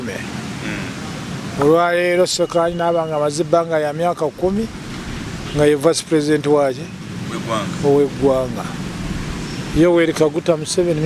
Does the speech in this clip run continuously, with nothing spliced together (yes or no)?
yes